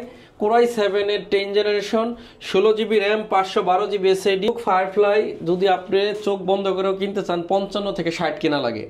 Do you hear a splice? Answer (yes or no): no